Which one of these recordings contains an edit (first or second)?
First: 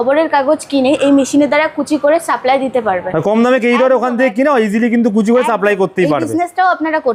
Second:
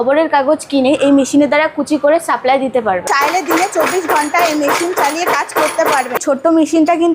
second